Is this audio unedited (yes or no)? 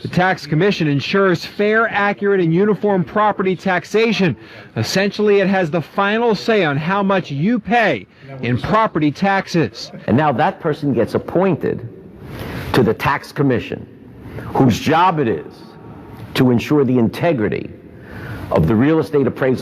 no